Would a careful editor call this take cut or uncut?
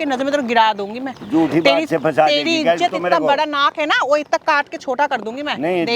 uncut